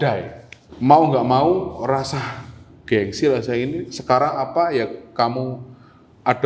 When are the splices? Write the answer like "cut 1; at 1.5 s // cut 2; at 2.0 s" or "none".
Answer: none